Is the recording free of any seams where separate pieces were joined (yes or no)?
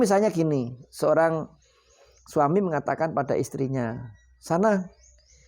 yes